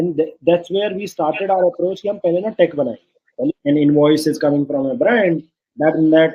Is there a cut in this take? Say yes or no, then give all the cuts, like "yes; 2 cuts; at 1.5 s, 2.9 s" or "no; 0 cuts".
yes; 1 cut; at 3.5 s